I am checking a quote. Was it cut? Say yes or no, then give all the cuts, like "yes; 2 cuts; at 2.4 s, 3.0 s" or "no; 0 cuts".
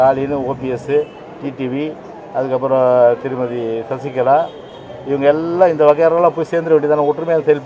no; 0 cuts